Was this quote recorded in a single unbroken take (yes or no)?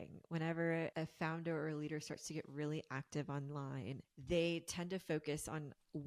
no